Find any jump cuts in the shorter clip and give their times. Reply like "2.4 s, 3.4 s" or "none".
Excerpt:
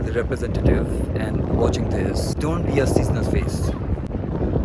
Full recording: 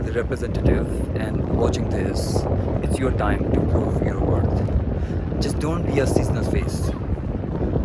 2.3 s